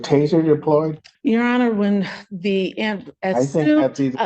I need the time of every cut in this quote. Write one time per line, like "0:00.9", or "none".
0:01.0